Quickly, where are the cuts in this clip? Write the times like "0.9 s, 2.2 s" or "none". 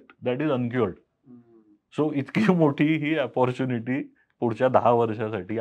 none